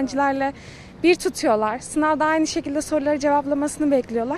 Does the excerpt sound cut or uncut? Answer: uncut